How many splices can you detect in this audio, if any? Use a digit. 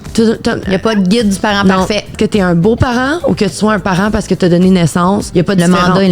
2